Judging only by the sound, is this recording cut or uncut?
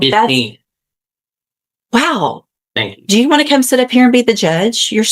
uncut